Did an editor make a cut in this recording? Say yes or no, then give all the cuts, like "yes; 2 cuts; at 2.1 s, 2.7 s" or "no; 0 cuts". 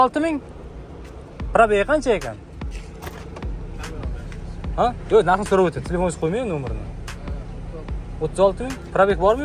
no; 0 cuts